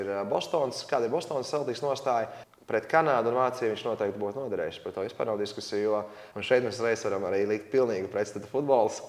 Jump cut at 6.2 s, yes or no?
yes